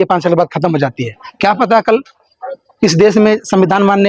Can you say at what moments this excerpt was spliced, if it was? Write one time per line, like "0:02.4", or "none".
none